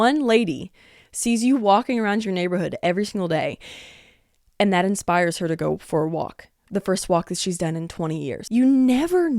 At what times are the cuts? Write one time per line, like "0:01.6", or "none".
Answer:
0:08.4